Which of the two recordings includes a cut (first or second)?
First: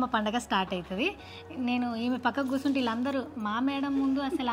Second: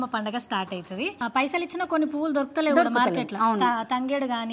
second